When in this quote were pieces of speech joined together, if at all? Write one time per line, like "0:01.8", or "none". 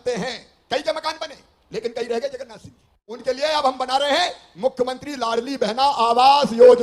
0:02.9